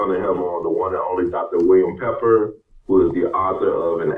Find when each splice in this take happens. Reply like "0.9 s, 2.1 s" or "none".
none